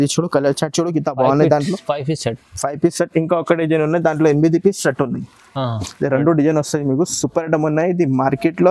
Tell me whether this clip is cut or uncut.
uncut